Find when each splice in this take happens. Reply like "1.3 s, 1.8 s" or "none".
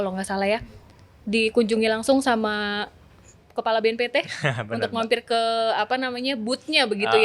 none